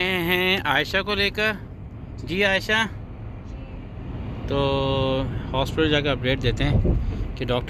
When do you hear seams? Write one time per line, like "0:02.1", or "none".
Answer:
none